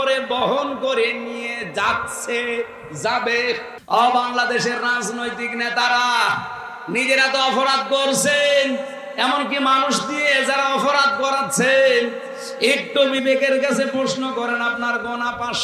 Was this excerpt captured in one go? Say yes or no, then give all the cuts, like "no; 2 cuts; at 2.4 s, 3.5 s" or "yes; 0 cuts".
no; 1 cut; at 3.7 s